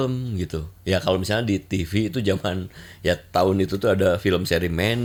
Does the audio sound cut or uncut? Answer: uncut